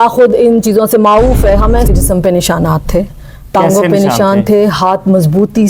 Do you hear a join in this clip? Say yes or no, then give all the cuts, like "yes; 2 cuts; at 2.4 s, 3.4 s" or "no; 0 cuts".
yes; 1 cut; at 1.9 s